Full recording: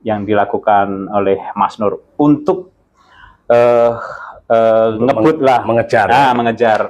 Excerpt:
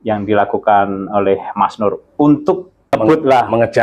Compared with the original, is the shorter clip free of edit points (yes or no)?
no